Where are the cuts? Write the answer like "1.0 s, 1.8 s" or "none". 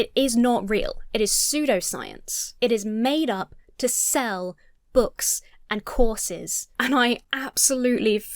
6.6 s